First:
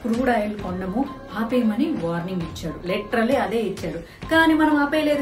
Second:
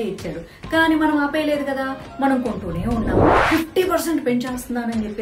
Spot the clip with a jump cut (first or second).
second